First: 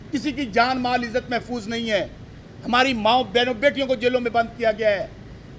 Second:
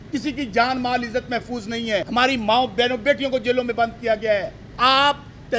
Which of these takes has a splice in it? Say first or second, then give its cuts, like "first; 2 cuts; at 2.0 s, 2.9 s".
second; 2 cuts; at 2.1 s, 4.7 s